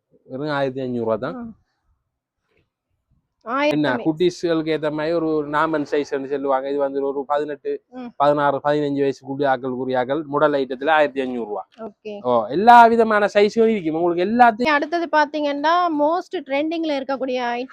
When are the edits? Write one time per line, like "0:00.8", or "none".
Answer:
0:03.7
0:14.7